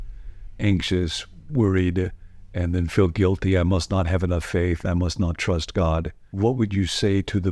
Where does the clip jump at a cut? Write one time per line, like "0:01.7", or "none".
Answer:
0:06.2

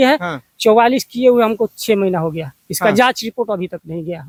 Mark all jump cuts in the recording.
none

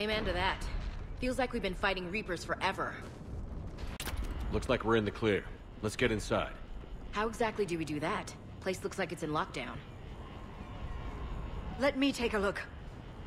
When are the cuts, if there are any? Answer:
0:04.0

